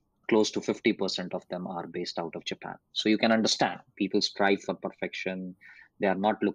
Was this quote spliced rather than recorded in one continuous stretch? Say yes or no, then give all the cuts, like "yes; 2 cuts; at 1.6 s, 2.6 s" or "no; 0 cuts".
no; 0 cuts